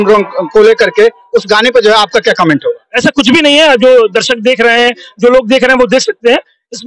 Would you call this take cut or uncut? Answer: uncut